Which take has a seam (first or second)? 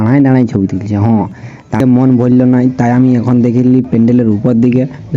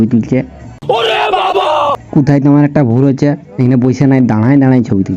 first